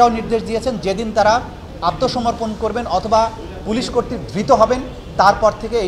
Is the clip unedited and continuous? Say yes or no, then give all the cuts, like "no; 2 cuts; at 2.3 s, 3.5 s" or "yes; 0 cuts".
yes; 0 cuts